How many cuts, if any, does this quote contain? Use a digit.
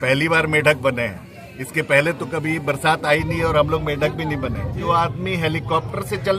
1